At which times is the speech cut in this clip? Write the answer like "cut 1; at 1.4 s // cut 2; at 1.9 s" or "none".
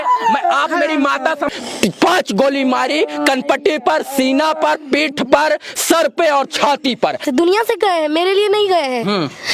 cut 1; at 1.5 s // cut 2; at 7.2 s